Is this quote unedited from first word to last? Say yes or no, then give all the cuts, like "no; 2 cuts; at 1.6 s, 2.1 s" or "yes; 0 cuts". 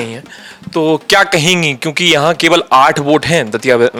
yes; 0 cuts